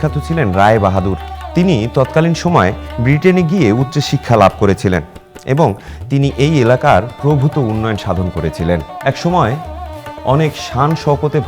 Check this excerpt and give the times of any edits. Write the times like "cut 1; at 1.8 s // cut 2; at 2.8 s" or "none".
cut 1; at 9.0 s